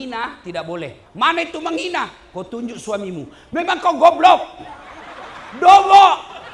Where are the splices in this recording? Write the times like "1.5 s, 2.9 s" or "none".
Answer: 1.0 s